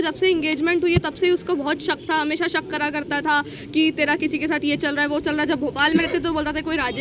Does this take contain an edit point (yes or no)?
no